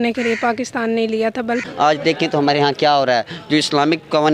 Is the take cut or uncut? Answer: cut